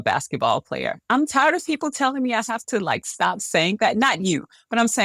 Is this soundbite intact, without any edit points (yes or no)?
yes